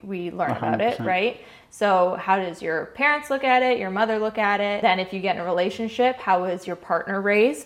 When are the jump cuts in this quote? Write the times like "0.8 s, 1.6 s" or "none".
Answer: 4.8 s